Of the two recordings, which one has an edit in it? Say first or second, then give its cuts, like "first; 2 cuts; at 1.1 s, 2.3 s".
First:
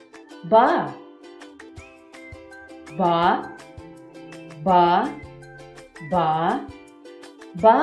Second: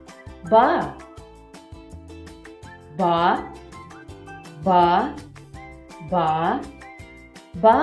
first; 2 cuts; at 1.0 s, 2.5 s